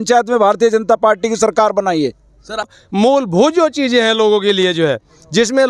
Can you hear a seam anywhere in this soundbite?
yes; 1 cut; at 2.8 s

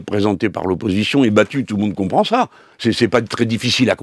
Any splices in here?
no; 0 cuts

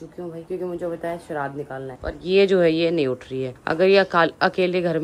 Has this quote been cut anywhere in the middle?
no; 0 cuts

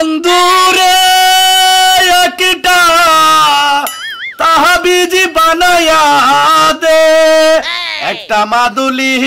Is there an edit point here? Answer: no; 0 cuts

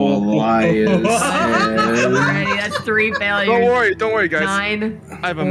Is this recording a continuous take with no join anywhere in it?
yes; 0 cuts

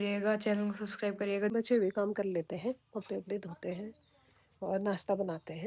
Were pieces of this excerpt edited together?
yes; 1 cut; at 1.5 s

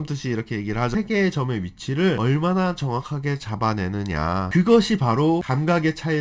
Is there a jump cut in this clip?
no; 0 cuts

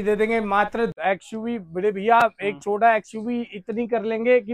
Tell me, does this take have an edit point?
yes; 1 cut; at 0.9 s

